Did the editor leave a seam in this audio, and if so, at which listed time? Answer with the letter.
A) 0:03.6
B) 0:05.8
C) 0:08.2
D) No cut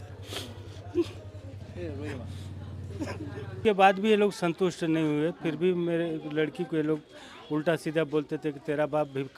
A